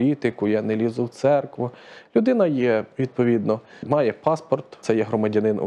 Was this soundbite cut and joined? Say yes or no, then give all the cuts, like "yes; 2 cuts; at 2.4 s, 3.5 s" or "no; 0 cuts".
yes; 2 cuts; at 3.8 s, 4.7 s